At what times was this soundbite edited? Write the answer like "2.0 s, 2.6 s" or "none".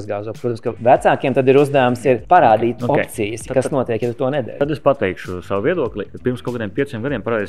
0.8 s, 2.2 s, 4.5 s, 6.0 s